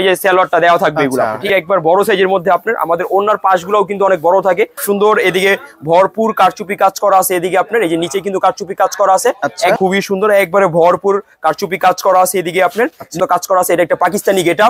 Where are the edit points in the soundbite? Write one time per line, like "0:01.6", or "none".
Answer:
0:01.5
0:04.8
0:09.8
0:13.2

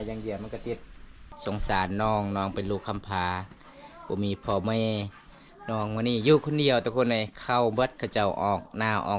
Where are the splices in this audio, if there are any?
0:01.3

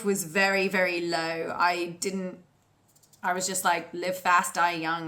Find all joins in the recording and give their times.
none

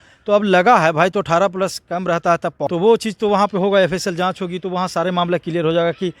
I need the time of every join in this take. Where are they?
0:02.6

